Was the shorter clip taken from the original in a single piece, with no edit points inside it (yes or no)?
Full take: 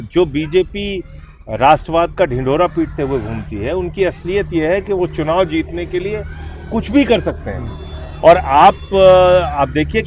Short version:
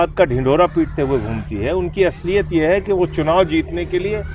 yes